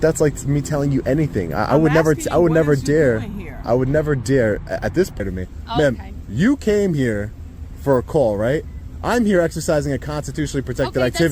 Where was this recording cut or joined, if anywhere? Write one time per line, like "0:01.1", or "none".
0:05.2